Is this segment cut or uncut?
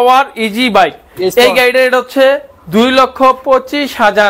uncut